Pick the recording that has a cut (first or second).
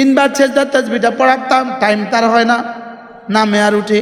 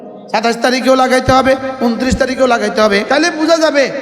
second